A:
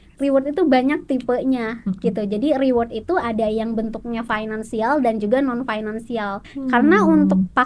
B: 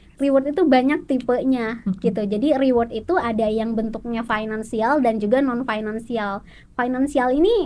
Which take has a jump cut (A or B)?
A